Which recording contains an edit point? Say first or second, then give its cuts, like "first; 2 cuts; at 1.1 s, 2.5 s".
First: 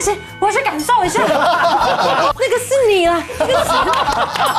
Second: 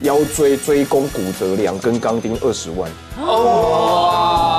first; 1 cut; at 2.3 s